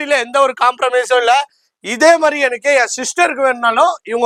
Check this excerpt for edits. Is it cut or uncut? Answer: uncut